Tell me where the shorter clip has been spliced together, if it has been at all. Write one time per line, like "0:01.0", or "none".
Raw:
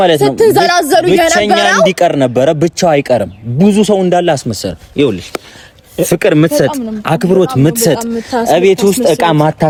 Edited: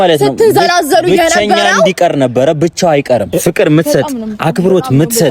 0:03.3